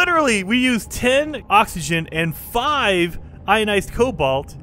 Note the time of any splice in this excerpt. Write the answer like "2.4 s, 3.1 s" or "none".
1.4 s